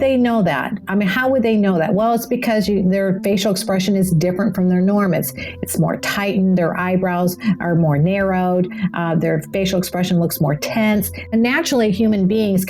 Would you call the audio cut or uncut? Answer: cut